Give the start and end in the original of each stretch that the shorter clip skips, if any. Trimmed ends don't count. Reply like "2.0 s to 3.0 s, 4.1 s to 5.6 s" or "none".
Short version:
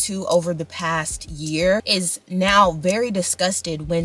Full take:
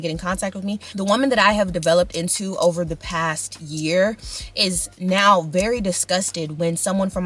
4.2 s to 4.6 s